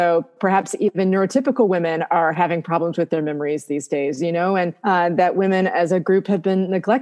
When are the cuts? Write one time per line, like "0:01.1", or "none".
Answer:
0:04.8